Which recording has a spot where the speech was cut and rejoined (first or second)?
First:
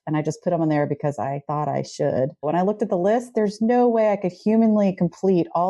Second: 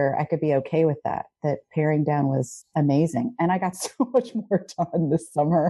first